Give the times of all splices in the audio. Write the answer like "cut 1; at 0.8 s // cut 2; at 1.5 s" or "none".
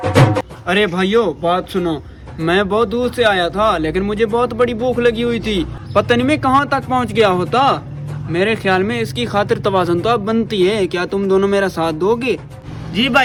none